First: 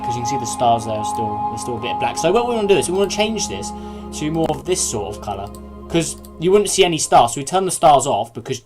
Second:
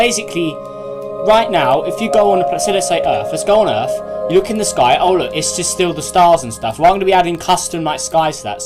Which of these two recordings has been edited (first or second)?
first